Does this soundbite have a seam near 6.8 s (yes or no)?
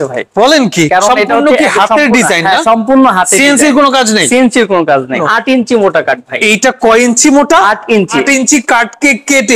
no